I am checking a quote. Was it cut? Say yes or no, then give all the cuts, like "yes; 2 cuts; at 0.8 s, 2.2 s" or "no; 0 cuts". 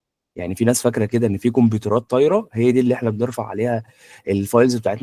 no; 0 cuts